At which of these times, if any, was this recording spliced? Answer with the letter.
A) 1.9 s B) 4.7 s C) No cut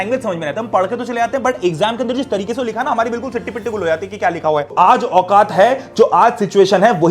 B